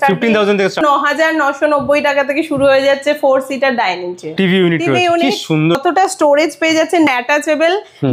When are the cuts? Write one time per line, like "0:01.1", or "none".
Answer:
0:00.8
0:04.4
0:05.8
0:07.1